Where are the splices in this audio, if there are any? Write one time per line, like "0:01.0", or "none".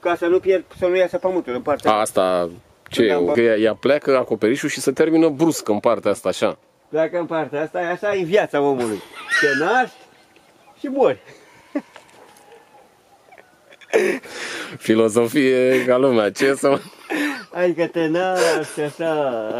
0:03.3